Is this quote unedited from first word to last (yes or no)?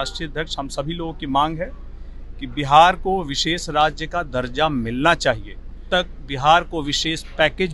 no